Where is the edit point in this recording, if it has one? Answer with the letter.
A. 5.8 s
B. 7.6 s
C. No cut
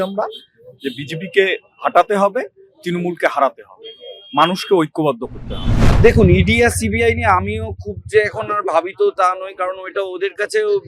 A